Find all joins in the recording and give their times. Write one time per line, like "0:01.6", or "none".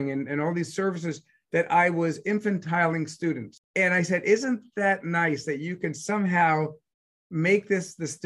0:03.6